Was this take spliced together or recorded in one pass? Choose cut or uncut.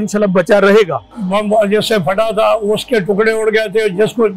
cut